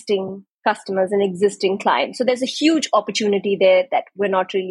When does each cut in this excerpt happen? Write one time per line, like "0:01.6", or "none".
none